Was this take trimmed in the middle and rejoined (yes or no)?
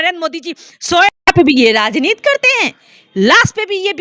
no